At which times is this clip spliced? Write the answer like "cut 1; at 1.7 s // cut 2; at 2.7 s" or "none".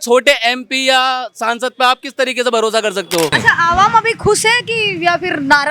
cut 1; at 3.3 s